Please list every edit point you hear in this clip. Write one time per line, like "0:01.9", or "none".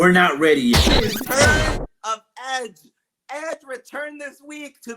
0:01.2